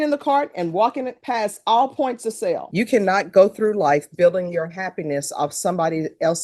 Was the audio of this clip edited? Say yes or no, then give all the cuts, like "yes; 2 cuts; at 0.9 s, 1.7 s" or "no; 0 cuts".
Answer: yes; 1 cut; at 2.7 s